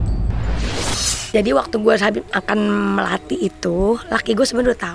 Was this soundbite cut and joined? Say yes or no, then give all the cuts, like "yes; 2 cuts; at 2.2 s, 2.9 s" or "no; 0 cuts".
no; 0 cuts